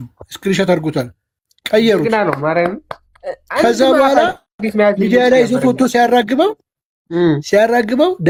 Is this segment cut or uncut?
uncut